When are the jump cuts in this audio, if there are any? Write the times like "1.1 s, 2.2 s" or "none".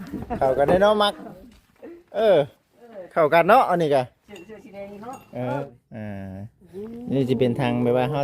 5.6 s